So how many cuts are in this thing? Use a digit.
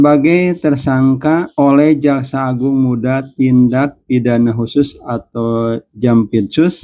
1